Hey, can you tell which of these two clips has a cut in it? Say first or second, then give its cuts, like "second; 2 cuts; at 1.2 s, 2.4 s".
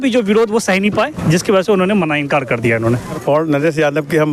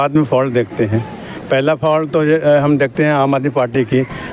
first; 1 cut; at 3.2 s